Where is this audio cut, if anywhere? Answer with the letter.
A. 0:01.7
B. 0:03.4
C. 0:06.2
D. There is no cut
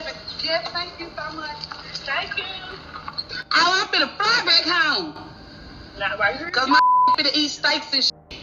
B